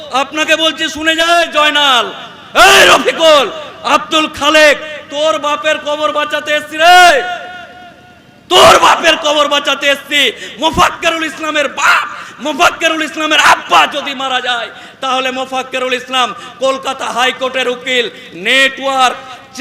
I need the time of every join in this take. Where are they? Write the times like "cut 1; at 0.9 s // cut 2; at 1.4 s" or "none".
cut 1; at 1.3 s